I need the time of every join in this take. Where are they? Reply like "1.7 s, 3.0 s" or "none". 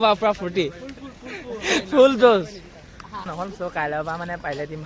3.3 s